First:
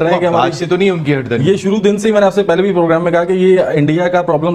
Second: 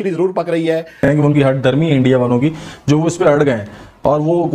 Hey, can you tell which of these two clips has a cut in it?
second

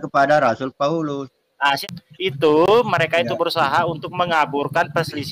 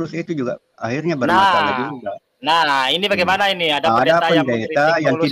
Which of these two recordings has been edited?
first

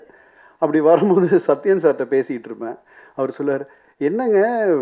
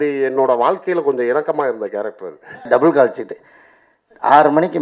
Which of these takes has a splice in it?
second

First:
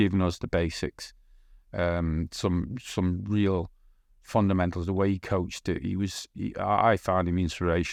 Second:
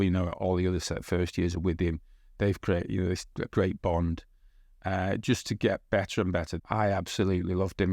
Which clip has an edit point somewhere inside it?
second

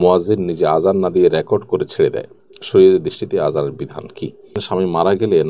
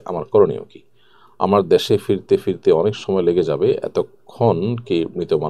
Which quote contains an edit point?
first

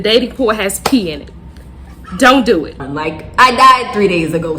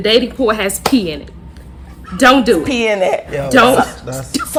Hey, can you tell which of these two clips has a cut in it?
first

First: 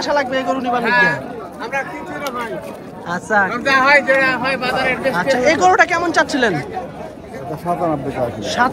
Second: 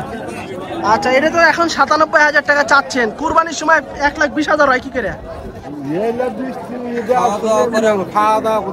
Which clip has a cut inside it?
first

